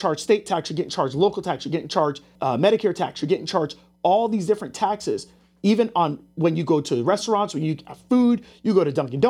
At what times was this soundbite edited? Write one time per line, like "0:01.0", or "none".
0:02.3

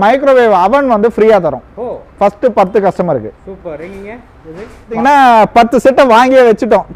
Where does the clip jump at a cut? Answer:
0:05.0

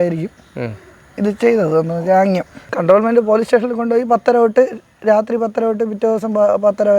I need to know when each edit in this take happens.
none

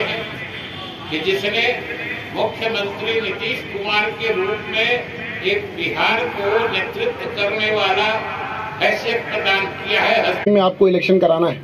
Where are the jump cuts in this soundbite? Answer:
0:10.5

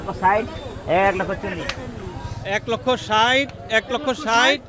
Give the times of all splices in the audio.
none

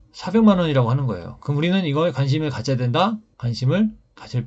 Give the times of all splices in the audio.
0:03.3

